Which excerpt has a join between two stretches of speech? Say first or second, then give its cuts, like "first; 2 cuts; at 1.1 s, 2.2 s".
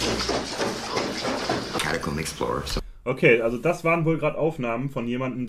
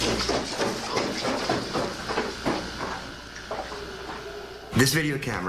first; 1 cut; at 1.8 s